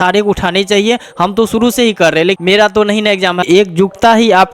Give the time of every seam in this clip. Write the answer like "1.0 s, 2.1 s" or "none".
2.4 s, 3.4 s